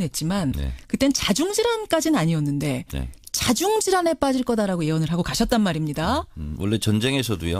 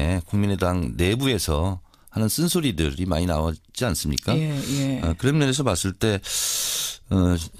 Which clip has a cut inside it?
second; 1 cut; at 1.8 s

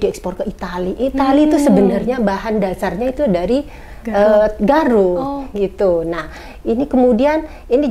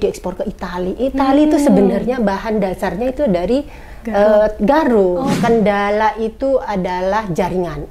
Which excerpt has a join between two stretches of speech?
second; 1 cut; at 5.3 s

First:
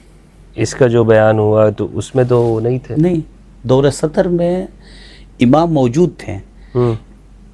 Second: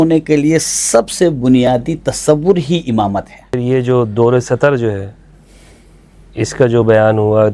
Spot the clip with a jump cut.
second; 1 cut; at 3.6 s

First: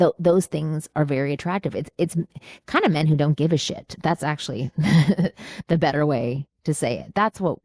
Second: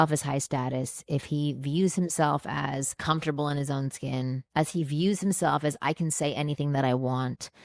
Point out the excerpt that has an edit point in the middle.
second; 2 cuts; at 2.9 s, 4.4 s

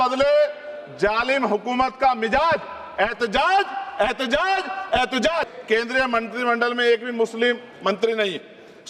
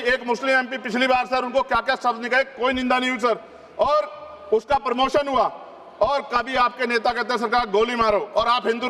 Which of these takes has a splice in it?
first; 1 cut; at 5.5 s

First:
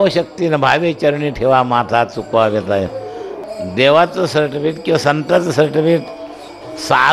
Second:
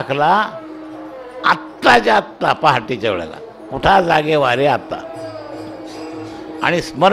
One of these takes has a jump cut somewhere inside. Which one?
first; 1 cut; at 3.4 s

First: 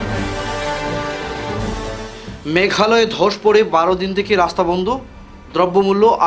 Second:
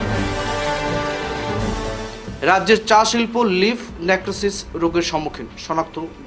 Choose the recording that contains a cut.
second; 1 cut; at 1.8 s

